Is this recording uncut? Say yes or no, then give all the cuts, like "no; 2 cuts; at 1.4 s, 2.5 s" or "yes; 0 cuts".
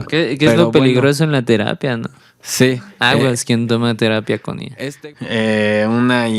no; 1 cut; at 4.6 s